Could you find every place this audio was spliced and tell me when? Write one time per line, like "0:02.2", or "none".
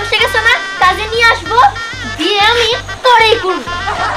none